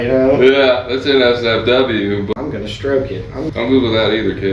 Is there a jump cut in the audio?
yes; 2 cuts; at 2.3 s, 3.5 s

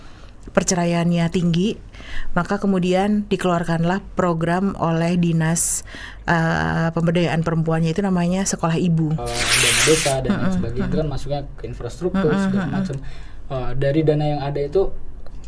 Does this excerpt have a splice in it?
yes; 1 cut; at 9.6 s

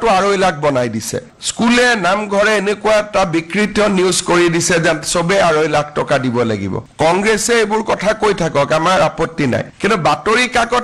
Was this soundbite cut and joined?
yes; 2 cuts; at 1.3 s, 6.8 s

